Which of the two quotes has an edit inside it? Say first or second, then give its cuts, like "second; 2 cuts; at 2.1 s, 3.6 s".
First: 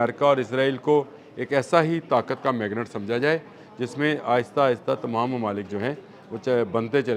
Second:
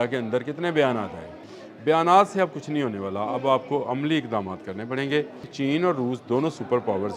second; 2 cuts; at 1.4 s, 5.5 s